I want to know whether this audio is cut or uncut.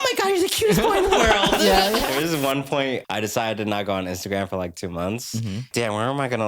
cut